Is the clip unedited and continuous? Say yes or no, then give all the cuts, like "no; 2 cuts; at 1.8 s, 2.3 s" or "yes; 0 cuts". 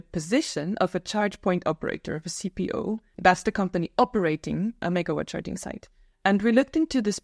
no; 2 cuts; at 3.1 s, 4.8 s